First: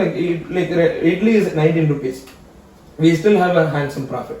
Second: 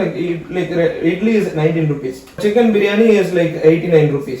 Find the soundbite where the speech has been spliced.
second; 1 cut; at 2.4 s

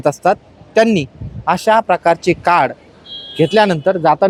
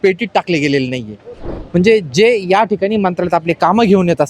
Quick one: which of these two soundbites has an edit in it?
second; 1 cut; at 1.5 s

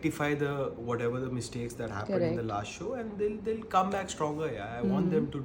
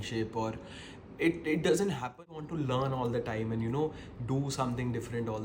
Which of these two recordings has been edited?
second; 1 cut; at 2.2 s

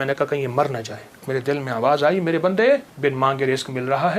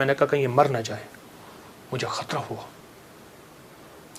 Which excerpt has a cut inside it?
first; 2 cuts; at 1.2 s, 2.9 s

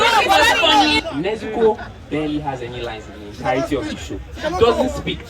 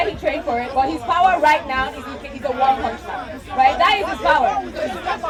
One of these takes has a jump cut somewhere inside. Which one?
first; 1 cut; at 1.0 s

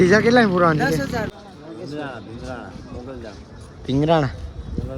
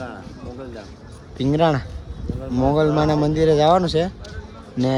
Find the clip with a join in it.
first; 1 cut; at 1.3 s

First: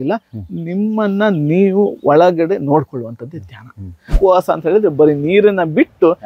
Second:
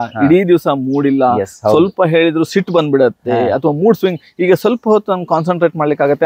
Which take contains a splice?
first; 1 cut; at 4.2 s

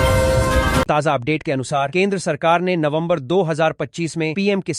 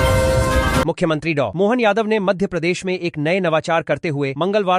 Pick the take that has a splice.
first; 2 cuts; at 0.9 s, 1.9 s

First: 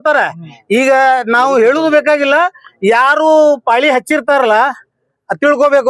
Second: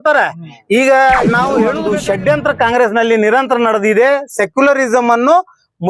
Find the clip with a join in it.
second; 1 cut; at 1.8 s

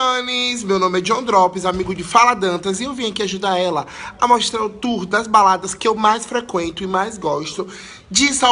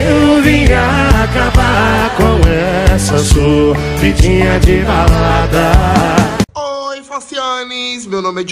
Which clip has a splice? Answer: second; 1 cut; at 6.5 s

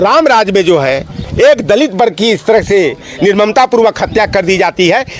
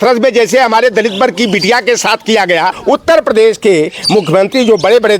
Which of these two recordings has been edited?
second; 1 cut; at 2.8 s

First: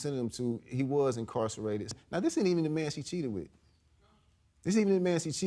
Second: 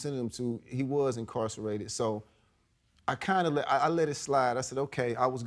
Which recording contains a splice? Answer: first; 1 cut; at 1.9 s

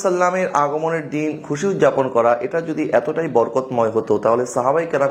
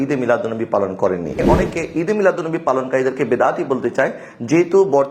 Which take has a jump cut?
second; 1 cut; at 1.4 s

